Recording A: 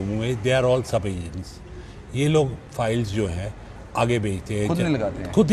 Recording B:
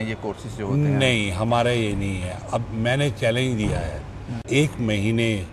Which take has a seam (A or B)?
B